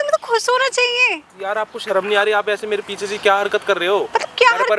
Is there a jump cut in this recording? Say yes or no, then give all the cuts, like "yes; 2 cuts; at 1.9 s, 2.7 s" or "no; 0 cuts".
no; 0 cuts